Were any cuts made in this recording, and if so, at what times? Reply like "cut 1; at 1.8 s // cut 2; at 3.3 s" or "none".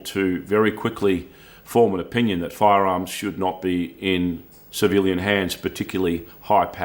none